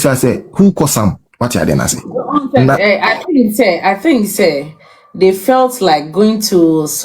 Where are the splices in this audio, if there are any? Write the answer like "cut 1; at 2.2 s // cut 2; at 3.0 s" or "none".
cut 1; at 1.2 s